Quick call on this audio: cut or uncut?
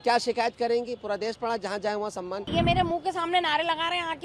cut